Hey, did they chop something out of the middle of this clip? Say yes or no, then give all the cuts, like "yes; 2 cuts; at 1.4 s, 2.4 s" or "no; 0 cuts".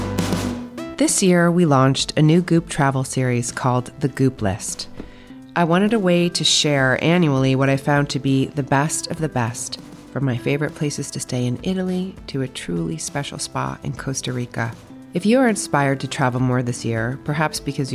yes; 1 cut; at 0.9 s